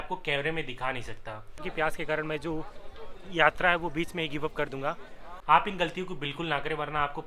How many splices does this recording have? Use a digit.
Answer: 2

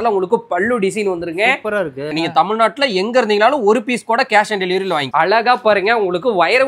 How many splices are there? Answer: 2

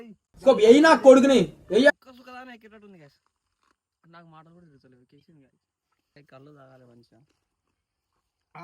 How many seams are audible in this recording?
1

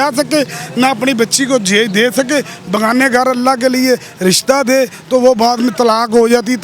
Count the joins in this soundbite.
0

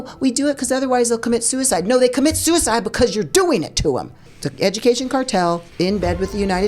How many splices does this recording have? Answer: 2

